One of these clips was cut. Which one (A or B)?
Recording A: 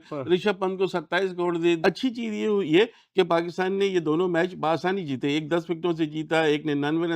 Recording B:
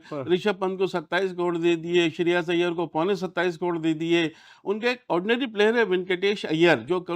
A